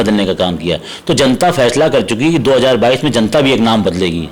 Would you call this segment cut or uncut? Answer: uncut